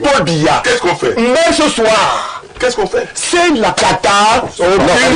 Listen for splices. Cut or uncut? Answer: uncut